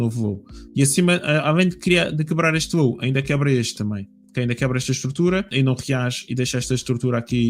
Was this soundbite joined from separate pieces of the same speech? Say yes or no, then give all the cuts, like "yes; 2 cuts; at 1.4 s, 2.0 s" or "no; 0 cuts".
yes; 1 cut; at 5.5 s